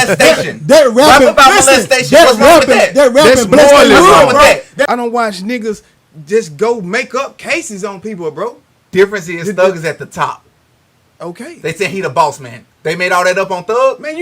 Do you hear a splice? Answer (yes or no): yes